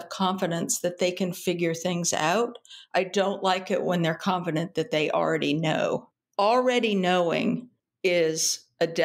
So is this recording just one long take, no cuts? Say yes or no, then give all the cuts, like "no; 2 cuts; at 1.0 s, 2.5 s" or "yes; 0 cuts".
no; 1 cut; at 6.2 s